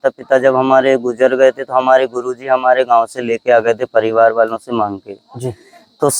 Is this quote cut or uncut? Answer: uncut